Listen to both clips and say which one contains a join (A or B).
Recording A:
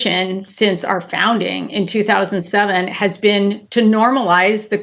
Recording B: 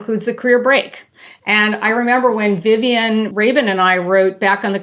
B